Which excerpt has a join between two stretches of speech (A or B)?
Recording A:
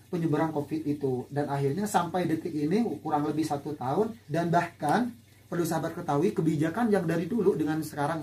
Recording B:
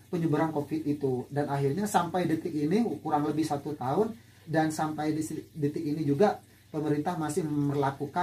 A